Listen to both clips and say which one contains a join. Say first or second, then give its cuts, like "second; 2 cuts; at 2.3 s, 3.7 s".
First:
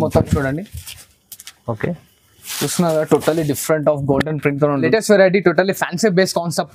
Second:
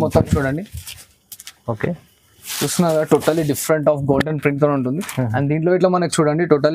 first; 1 cut; at 4.8 s